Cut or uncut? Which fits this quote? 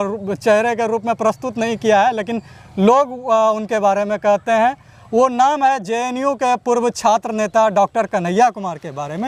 uncut